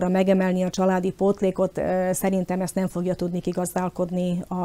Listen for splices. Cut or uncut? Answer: uncut